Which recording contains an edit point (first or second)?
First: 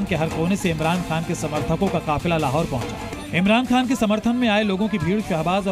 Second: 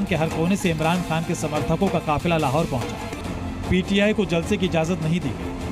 second